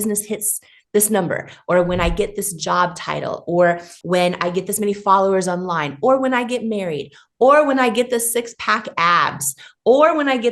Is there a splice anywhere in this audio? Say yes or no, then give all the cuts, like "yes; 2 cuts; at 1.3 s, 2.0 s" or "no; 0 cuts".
yes; 1 cut; at 3.9 s